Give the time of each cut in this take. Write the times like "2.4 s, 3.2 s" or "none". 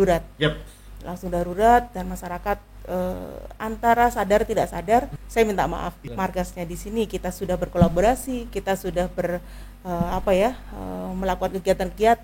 5.2 s, 6.0 s